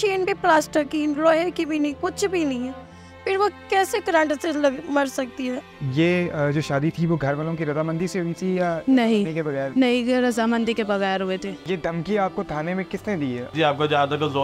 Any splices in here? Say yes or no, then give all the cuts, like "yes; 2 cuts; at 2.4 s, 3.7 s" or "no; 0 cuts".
yes; 3 cuts; at 5.8 s, 11.6 s, 13.5 s